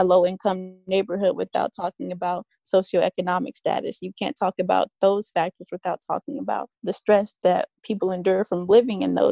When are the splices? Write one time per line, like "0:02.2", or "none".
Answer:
0:06.7
0:07.8